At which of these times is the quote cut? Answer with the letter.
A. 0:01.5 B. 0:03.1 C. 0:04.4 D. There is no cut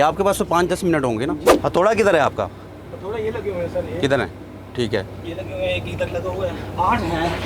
A